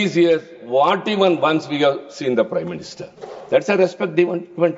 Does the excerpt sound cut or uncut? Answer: uncut